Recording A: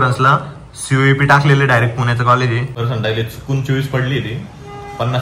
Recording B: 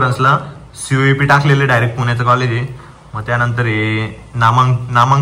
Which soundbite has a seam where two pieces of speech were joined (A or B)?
A